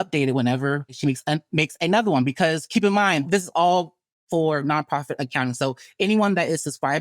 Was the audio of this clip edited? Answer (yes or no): yes